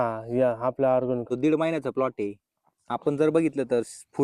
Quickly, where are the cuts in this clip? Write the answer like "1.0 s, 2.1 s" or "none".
1.2 s